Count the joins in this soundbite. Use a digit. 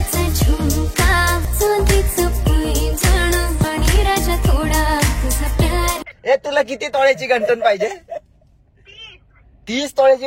0